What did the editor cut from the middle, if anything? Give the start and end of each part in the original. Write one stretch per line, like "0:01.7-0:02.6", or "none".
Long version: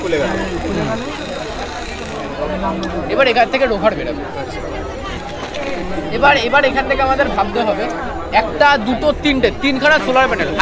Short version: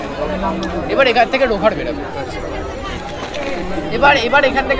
none